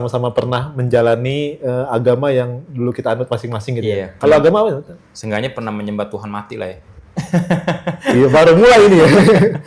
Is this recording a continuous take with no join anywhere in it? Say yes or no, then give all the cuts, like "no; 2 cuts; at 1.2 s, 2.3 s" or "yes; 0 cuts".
yes; 0 cuts